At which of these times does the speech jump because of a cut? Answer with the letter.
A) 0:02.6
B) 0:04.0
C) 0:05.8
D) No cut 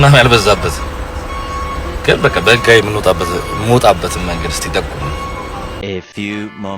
C